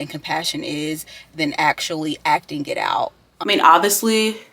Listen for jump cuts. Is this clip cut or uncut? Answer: cut